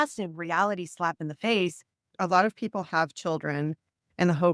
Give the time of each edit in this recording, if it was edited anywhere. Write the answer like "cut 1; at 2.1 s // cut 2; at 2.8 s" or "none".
cut 1; at 2.0 s